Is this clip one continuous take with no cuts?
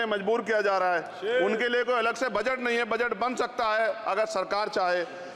yes; 0 cuts

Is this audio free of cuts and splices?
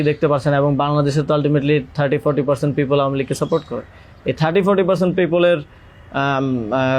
yes; 0 cuts

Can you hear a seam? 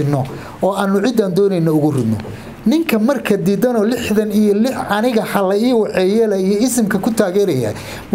no; 0 cuts

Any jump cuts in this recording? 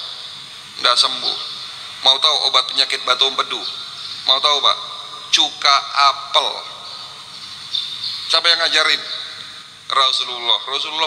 no; 0 cuts

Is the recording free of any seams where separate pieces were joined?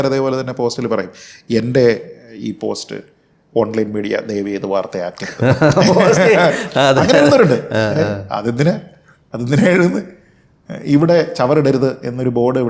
yes; 0 cuts

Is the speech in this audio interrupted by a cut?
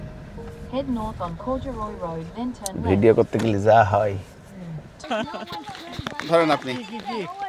yes; 1 cut; at 5.1 s

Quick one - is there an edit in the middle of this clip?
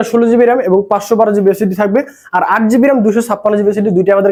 no; 0 cuts

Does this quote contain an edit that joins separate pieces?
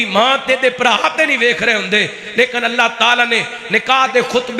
no; 0 cuts

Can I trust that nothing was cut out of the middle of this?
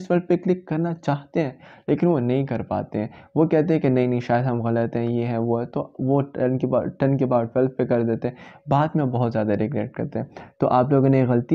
yes; 0 cuts

